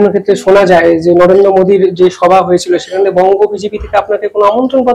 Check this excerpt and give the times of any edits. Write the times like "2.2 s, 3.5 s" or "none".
none